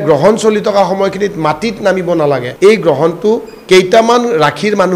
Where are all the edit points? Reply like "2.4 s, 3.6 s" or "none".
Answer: 2.5 s